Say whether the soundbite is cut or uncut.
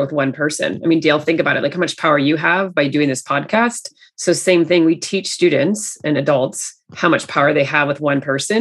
cut